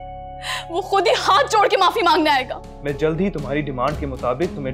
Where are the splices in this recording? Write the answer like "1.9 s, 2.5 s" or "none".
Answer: 2.7 s